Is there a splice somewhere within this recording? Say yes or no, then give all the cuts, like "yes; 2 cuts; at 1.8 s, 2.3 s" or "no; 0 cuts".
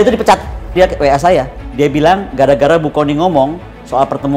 yes; 2 cuts; at 0.7 s, 1.6 s